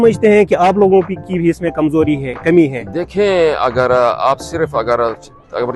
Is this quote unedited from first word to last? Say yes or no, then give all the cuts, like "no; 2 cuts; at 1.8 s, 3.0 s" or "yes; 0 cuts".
yes; 0 cuts